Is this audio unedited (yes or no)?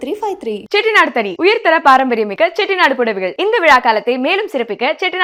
yes